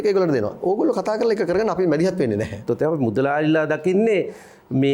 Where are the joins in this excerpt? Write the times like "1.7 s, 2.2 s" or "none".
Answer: 2.6 s

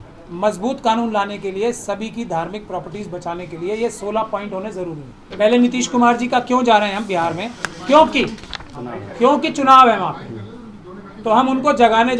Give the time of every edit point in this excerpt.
5.2 s

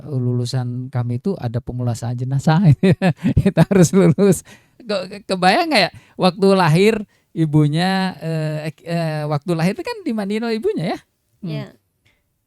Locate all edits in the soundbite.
none

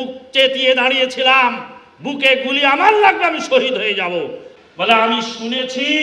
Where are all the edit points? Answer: 4.4 s

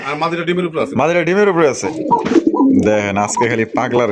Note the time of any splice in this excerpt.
1.9 s

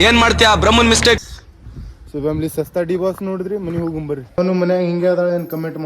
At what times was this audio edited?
4.4 s

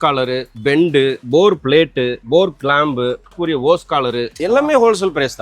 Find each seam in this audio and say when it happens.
1.2 s, 2.2 s, 3.4 s, 4.4 s

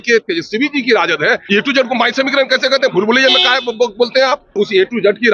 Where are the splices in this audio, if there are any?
1.4 s, 4.5 s

